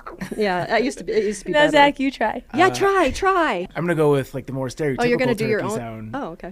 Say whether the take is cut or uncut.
cut